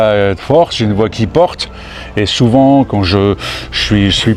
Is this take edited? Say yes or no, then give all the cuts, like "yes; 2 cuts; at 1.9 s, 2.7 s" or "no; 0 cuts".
no; 0 cuts